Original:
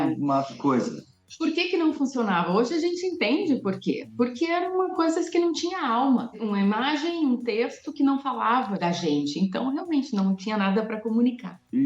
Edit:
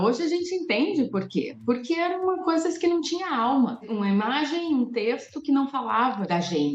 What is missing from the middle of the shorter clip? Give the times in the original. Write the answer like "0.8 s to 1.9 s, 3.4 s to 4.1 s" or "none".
none